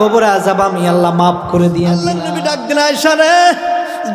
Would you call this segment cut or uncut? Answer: cut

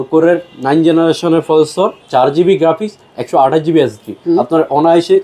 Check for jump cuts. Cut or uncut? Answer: cut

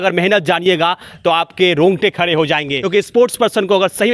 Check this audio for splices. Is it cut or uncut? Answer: cut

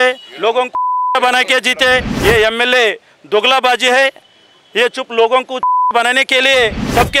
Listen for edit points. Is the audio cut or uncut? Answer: cut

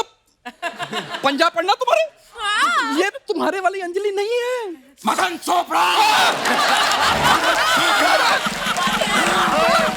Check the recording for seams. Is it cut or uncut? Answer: uncut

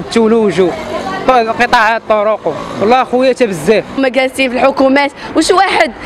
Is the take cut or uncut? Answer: cut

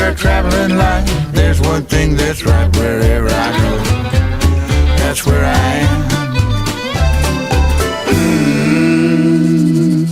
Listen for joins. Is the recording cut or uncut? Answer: uncut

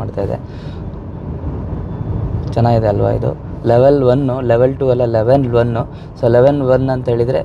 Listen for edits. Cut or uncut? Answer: uncut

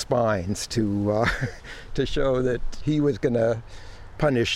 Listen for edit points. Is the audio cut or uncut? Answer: cut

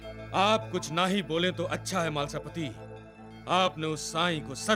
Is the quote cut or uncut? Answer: uncut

